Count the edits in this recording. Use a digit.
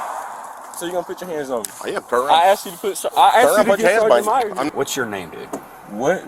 1